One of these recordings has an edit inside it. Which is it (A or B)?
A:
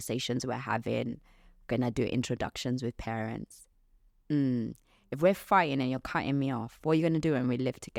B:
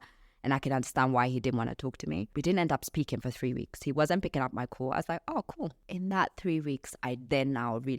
B